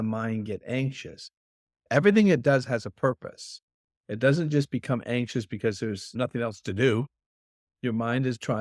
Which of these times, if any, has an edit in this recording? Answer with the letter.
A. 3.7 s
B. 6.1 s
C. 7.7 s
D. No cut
B